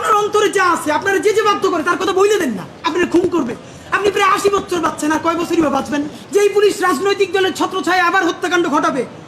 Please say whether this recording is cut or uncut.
cut